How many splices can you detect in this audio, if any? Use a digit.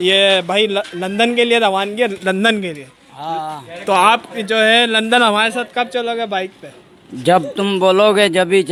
0